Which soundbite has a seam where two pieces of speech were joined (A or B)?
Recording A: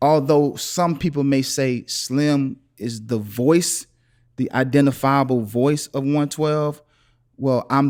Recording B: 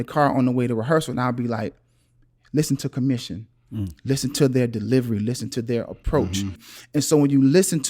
B